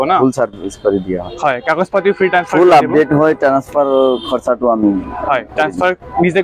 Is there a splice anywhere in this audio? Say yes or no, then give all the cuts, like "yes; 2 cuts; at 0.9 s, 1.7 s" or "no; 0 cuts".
no; 0 cuts